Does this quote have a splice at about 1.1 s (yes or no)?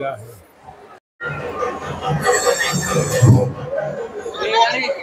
no